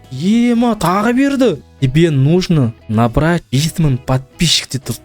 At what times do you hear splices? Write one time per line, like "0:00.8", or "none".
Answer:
0:01.7
0:02.8
0:03.4